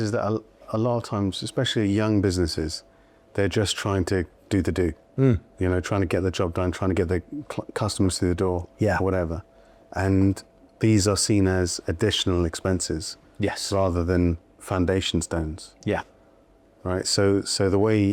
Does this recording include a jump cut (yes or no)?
no